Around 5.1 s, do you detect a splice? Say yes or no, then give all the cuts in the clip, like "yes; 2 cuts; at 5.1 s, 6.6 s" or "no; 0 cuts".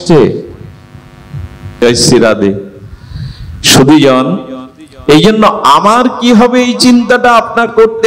no; 1 cut; at 1.8 s